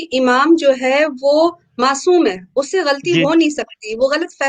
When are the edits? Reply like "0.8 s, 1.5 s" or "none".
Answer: none